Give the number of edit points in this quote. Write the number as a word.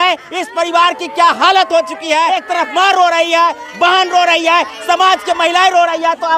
one